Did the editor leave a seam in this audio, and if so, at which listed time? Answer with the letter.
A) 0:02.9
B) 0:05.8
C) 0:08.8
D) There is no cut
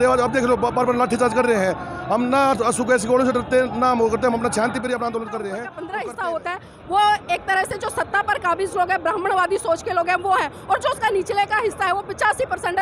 B